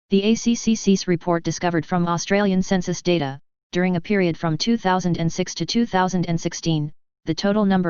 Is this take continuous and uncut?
no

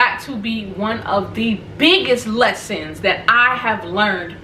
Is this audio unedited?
yes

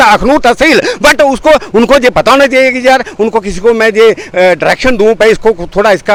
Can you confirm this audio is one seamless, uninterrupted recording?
yes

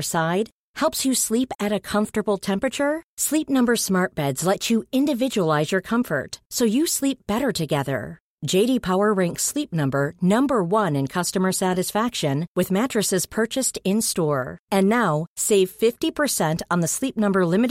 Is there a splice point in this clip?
no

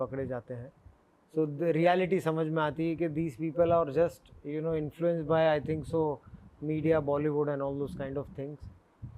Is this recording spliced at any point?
no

